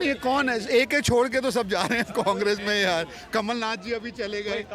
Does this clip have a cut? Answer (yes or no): no